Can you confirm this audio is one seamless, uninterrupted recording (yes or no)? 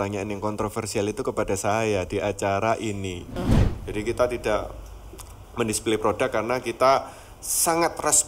no